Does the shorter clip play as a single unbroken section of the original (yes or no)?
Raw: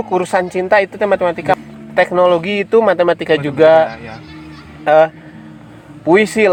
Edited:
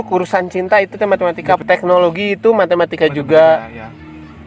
no